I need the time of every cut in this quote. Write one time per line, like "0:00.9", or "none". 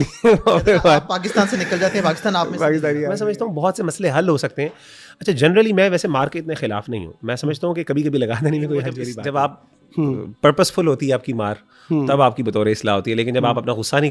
0:03.1
0:09.1